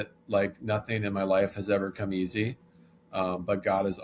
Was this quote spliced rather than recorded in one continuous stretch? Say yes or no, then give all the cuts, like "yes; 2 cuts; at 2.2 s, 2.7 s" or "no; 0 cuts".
no; 0 cuts